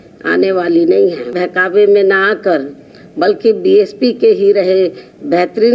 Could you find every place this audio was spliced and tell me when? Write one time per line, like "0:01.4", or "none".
0:01.4